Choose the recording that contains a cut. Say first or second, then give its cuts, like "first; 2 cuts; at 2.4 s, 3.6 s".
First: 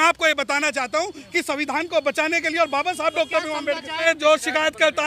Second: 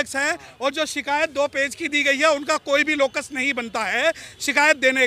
first; 1 cut; at 4.0 s